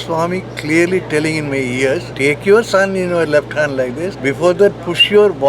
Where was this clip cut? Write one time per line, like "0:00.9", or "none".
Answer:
0:02.1
0:04.2